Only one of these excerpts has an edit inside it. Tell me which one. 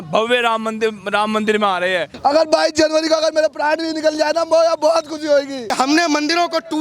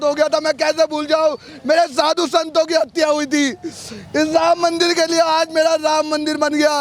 first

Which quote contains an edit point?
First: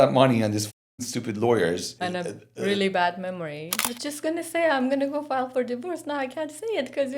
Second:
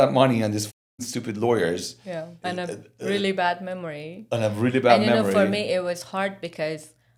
first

